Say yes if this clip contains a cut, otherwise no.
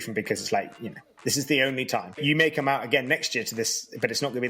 yes